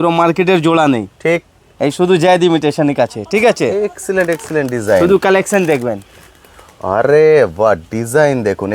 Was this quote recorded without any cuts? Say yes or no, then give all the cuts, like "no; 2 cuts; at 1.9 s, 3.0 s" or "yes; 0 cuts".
yes; 0 cuts